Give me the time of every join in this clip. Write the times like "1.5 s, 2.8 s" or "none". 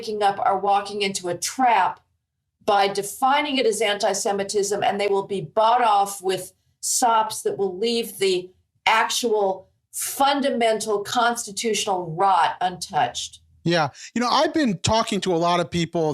none